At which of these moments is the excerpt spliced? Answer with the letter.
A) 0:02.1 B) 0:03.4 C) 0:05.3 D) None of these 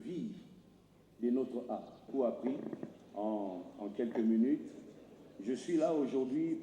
A